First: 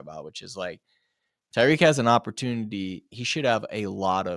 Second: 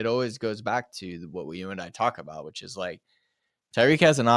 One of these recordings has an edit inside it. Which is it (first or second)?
first